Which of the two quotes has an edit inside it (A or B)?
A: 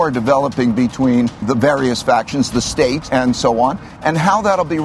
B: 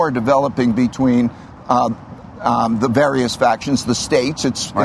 A